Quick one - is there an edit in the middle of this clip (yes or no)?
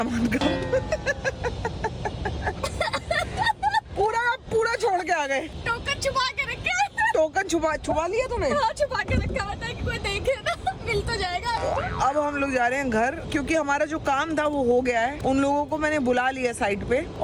no